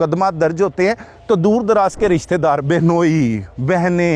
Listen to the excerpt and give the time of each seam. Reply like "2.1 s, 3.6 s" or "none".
none